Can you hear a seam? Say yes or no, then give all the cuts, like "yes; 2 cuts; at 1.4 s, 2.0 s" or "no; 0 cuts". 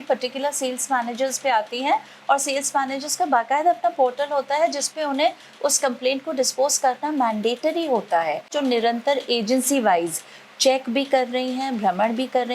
yes; 1 cut; at 8.5 s